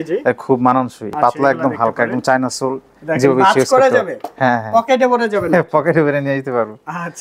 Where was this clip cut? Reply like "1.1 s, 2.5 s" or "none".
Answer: 1.1 s